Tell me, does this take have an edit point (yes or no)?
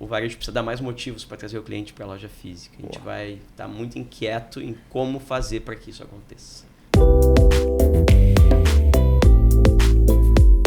yes